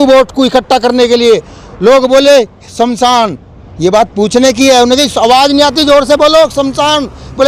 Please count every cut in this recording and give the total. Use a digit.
0